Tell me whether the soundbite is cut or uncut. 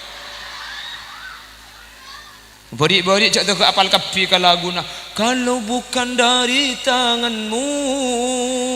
cut